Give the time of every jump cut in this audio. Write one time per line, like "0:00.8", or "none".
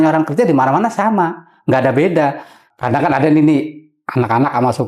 0:02.7